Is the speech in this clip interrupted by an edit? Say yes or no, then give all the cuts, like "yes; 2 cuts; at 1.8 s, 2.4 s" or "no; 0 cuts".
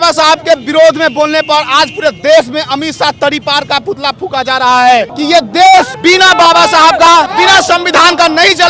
yes; 3 cuts; at 5.1 s, 5.9 s, 7.3 s